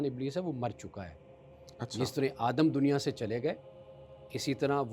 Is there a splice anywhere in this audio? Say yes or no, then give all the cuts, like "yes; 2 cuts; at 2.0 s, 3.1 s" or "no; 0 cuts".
no; 0 cuts